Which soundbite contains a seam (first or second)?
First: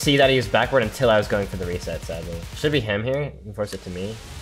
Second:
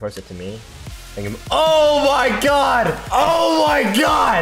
second